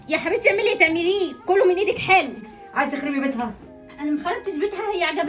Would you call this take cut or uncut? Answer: cut